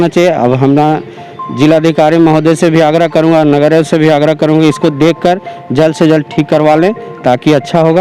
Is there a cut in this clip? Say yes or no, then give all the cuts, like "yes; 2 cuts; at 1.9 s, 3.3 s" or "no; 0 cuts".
no; 0 cuts